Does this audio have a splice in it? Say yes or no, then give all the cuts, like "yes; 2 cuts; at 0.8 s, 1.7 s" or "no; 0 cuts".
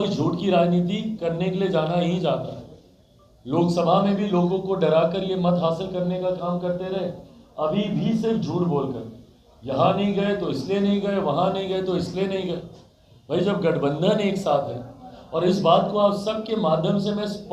no; 0 cuts